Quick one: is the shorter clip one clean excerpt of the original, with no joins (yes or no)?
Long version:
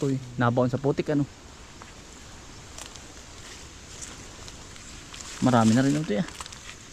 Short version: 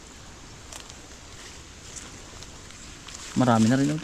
yes